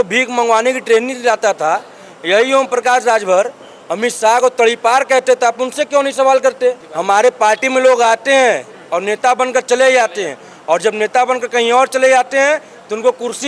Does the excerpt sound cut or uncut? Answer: uncut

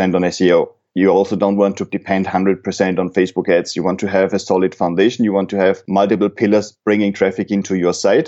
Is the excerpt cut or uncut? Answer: cut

